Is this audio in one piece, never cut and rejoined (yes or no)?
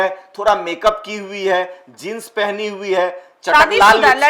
yes